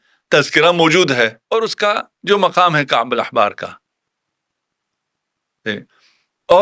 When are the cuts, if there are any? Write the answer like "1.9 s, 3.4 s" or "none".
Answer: 1.4 s